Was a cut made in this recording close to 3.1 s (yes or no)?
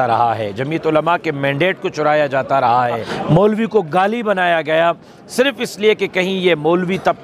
yes